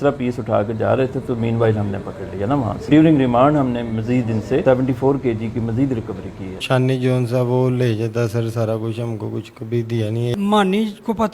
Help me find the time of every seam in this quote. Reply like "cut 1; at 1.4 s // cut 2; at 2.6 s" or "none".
cut 1; at 2.9 s // cut 2; at 4.6 s // cut 3; at 6.6 s // cut 4; at 10.3 s